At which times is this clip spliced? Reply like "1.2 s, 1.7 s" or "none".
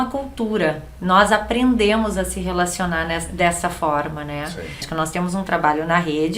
4.9 s